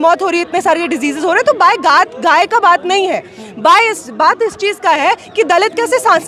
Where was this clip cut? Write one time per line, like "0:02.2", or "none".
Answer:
none